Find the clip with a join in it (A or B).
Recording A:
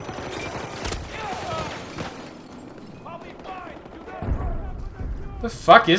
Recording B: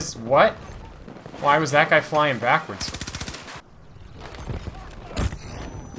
B